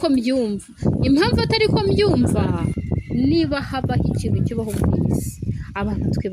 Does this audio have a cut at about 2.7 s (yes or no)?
yes